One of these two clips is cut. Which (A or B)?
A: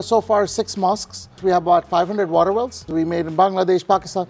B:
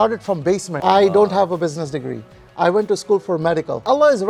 A